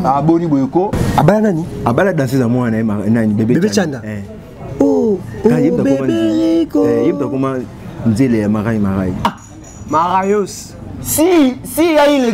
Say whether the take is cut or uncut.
cut